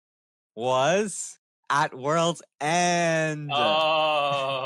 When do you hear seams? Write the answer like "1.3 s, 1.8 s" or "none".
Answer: none